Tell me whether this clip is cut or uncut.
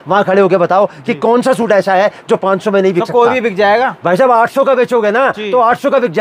uncut